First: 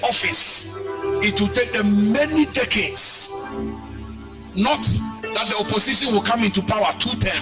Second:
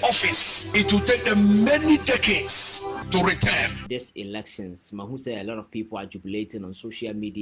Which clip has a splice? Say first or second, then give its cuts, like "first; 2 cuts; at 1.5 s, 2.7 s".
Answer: second; 3 cuts; at 0.7 s, 3.0 s, 3.8 s